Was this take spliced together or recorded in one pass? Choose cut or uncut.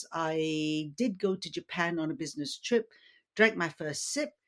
uncut